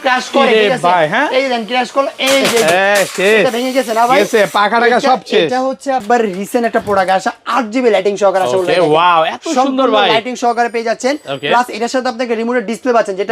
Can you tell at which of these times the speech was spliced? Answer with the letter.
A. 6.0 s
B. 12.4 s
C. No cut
A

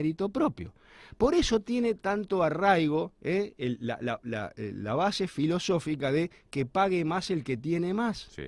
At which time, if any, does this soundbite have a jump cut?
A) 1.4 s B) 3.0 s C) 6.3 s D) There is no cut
D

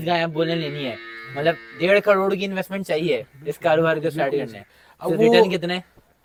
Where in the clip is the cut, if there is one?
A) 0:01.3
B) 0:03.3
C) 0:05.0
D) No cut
D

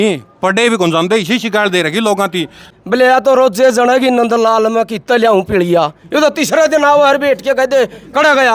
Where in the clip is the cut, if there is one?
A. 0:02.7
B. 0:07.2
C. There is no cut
A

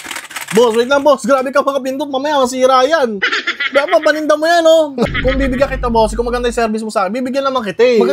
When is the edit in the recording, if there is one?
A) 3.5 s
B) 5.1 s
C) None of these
B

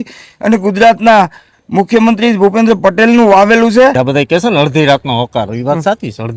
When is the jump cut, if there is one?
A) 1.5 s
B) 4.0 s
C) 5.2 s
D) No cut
B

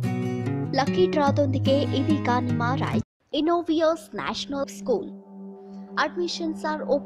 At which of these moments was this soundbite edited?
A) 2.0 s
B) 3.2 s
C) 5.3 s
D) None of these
B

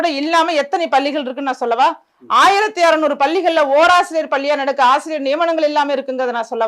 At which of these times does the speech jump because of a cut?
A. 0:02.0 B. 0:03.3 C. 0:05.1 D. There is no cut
D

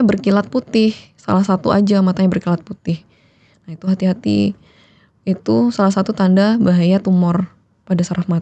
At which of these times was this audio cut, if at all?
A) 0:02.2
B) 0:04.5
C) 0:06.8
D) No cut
D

